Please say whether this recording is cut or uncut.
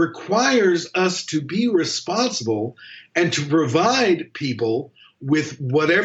uncut